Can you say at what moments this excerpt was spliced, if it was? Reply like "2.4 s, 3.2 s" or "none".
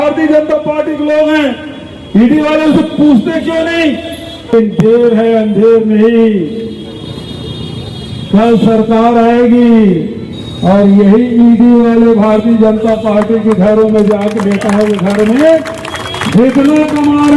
4.5 s